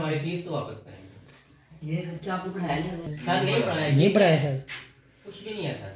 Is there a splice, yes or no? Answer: no